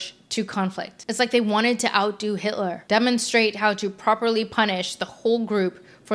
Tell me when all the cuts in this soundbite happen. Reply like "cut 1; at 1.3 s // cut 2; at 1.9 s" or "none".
none